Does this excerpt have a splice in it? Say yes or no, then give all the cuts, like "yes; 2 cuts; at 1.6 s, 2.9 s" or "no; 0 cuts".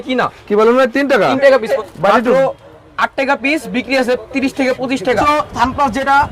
yes; 2 cuts; at 1.7 s, 5.2 s